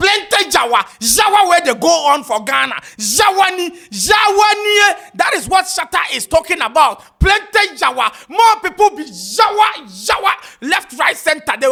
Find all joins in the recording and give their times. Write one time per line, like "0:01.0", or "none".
none